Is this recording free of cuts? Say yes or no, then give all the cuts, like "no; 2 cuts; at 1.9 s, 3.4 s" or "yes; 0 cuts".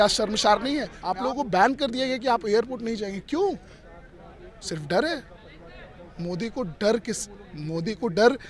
no; 1 cut; at 1.0 s